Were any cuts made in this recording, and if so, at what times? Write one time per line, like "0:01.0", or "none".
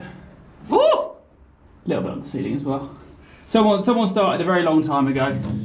none